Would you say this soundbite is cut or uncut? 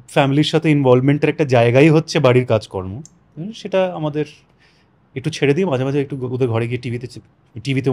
uncut